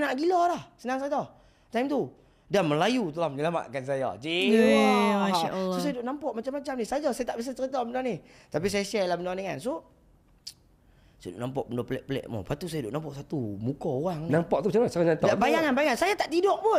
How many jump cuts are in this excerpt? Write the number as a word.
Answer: zero